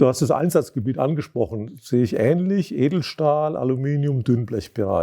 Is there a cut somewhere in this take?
no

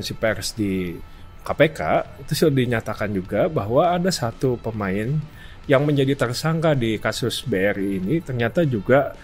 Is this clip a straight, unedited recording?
yes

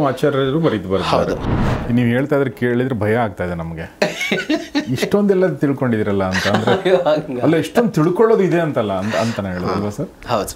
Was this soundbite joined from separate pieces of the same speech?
yes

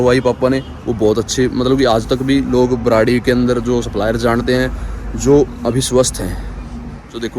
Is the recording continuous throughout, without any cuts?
yes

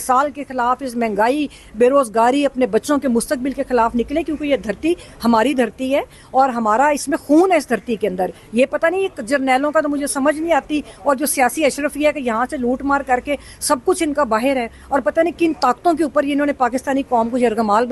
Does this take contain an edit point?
no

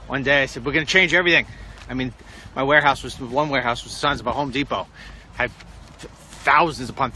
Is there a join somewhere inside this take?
yes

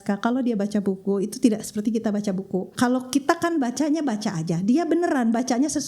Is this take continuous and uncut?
no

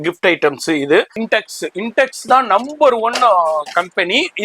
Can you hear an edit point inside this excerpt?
yes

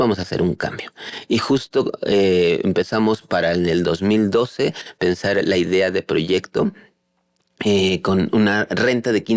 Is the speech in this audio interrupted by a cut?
no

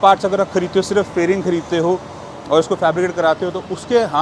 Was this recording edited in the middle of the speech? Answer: no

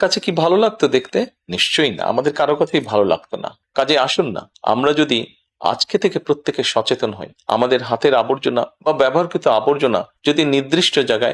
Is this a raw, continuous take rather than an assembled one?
no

